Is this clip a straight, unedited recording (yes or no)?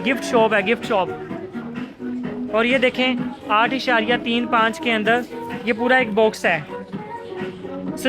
yes